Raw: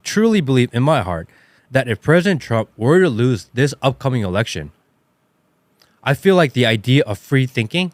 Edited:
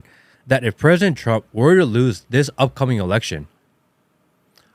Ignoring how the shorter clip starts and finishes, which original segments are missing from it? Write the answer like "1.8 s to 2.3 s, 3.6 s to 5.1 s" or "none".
none